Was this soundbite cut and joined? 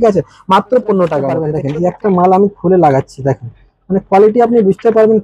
yes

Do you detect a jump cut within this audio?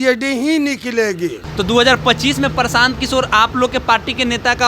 yes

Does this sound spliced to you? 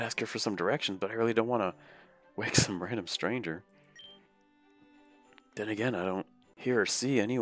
yes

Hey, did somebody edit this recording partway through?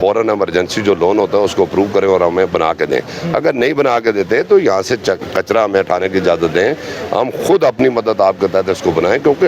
no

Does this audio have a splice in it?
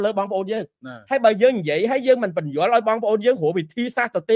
no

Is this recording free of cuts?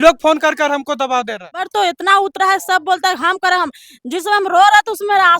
no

